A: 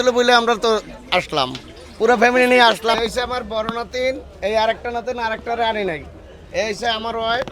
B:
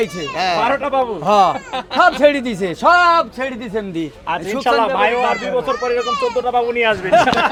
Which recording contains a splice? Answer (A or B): A